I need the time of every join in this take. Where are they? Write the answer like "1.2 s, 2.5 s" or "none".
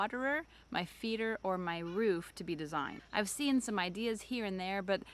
none